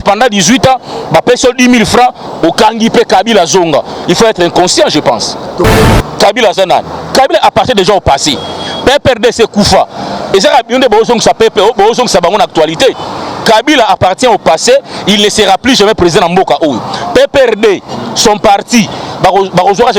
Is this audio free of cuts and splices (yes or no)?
no